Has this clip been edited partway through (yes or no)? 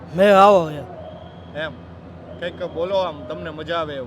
no